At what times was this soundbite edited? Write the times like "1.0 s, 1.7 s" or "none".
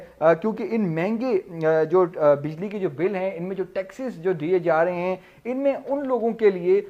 none